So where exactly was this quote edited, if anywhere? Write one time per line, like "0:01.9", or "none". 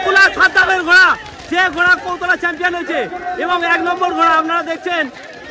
none